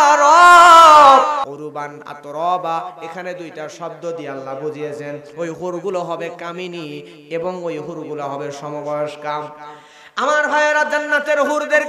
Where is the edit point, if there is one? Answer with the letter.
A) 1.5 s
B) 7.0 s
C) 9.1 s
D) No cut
A